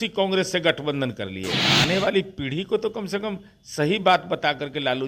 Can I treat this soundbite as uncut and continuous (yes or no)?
no